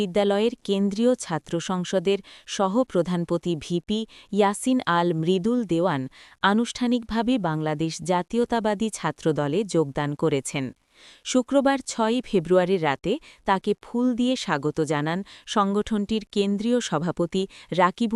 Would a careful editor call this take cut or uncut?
uncut